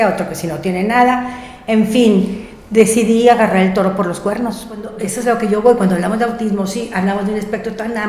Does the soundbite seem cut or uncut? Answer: cut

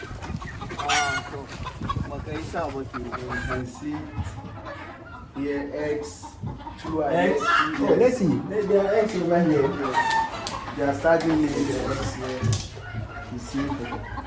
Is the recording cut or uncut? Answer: cut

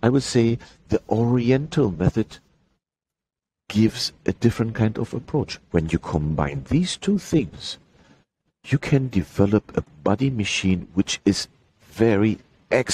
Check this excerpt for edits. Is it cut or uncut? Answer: uncut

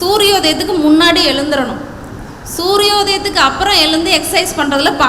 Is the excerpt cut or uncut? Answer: uncut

